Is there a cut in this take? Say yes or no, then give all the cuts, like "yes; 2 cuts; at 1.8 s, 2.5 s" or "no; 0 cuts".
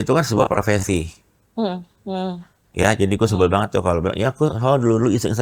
no; 0 cuts